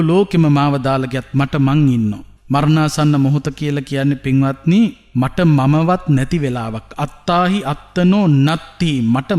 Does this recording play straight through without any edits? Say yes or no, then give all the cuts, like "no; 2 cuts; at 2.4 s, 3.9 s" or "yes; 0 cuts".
no; 2 cuts; at 2.3 s, 5.0 s